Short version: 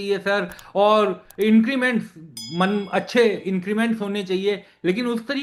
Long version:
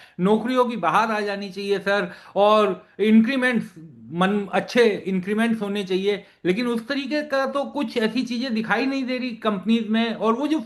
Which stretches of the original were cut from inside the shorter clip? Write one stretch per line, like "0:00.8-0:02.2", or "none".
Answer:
none